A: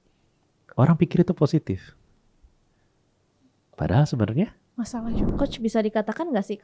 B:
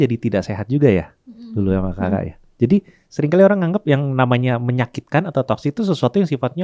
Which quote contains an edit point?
A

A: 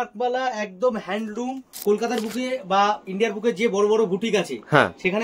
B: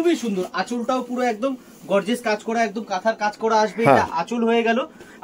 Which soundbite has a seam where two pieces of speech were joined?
A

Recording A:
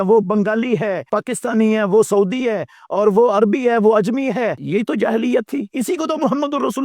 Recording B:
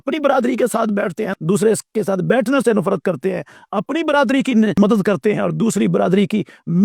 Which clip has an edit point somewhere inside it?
A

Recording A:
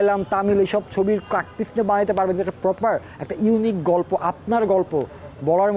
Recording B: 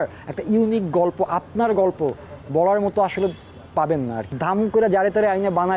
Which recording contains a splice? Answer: B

